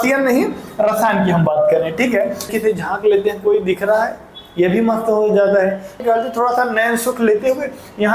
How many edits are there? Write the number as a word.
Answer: two